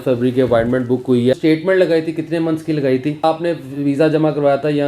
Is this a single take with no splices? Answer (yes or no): no